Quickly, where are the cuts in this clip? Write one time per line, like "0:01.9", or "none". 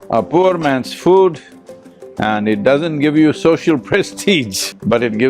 none